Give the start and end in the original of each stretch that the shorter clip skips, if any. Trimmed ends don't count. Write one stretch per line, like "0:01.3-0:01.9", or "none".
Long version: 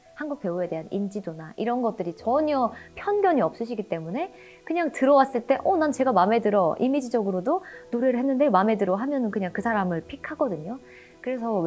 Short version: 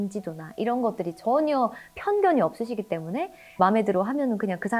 0:04.6-0:08.5